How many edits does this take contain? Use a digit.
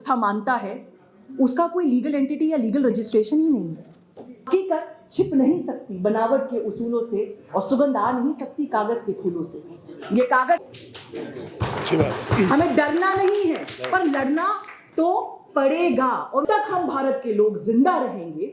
3